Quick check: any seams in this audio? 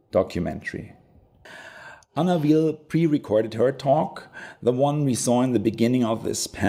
no; 0 cuts

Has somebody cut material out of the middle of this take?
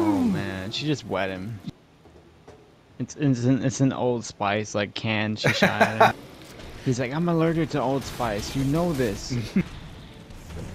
yes; 3 cuts; at 1.6 s, 6.2 s, 9.6 s

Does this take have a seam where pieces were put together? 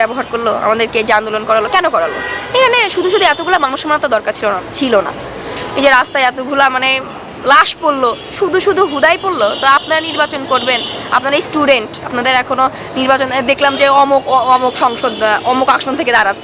no; 0 cuts

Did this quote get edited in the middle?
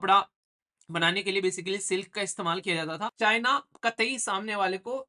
yes; 1 cut; at 3.1 s

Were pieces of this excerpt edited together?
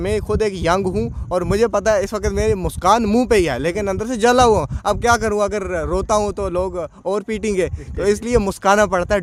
no; 0 cuts

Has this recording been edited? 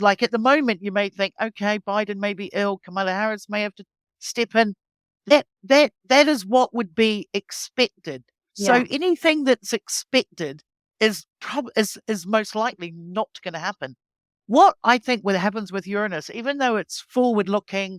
no; 0 cuts

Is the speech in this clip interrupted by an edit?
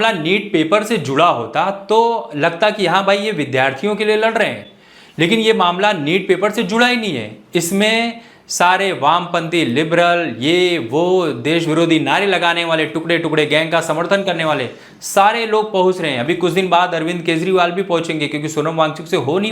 no; 0 cuts

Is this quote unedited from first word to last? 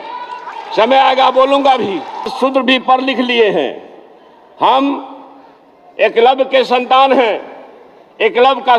no; 1 cut; at 2.3 s

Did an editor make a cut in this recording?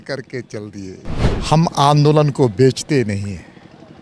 yes; 1 cut; at 1.2 s

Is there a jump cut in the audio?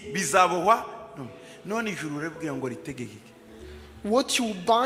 no; 0 cuts

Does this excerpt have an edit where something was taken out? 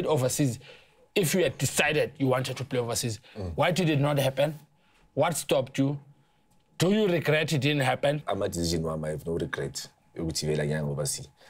yes; 1 cut; at 8.2 s

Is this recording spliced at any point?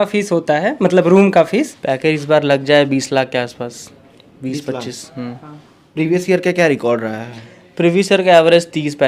yes; 1 cut; at 1.8 s

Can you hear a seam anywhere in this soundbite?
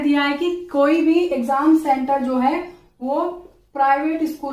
no; 0 cuts

